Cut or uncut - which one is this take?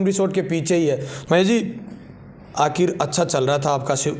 cut